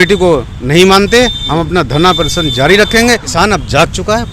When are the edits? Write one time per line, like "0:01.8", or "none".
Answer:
0:03.3